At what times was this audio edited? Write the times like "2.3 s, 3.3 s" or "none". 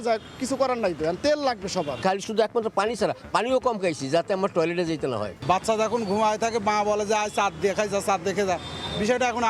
1.9 s, 5.3 s